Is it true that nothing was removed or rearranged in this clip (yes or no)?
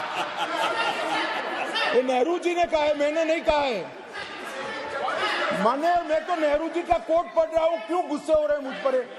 yes